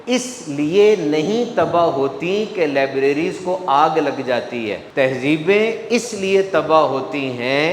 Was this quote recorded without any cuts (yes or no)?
yes